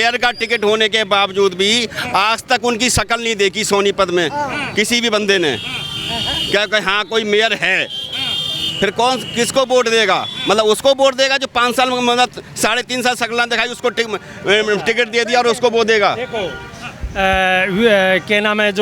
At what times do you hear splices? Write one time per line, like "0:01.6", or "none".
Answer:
none